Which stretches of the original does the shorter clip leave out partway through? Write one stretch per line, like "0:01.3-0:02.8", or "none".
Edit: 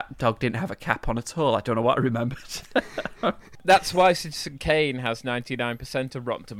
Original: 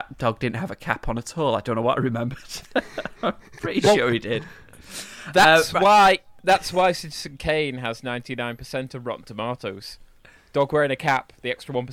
0:03.5-0:06.3